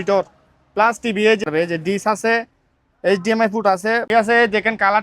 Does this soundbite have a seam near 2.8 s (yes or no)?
no